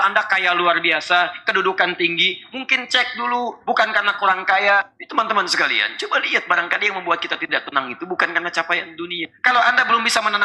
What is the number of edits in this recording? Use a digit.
2